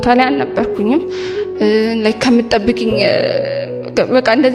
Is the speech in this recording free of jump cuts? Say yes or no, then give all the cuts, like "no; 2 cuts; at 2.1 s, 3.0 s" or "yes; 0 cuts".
yes; 0 cuts